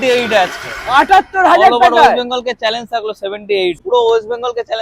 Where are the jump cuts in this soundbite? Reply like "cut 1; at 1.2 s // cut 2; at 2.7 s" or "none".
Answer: cut 1; at 3.8 s